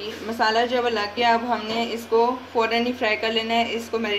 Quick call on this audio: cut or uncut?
uncut